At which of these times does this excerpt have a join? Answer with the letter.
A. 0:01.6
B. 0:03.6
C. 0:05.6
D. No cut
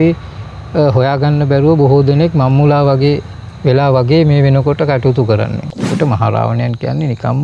C